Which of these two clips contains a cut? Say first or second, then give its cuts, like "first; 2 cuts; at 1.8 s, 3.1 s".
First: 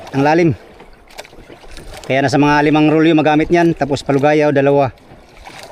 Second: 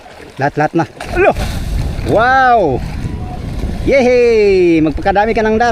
second; 1 cut; at 1.0 s